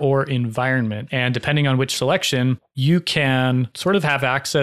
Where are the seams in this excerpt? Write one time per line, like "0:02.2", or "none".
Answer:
0:01.0
0:02.7
0:03.7